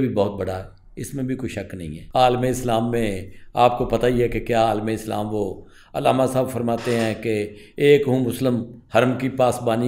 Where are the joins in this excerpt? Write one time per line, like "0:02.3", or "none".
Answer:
0:01.9